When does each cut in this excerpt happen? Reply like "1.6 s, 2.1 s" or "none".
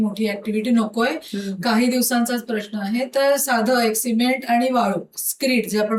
none